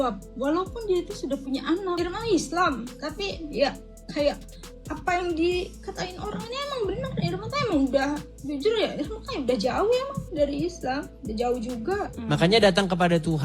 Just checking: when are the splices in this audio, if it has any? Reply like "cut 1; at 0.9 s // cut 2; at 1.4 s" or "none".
cut 1; at 2.0 s // cut 2; at 12.1 s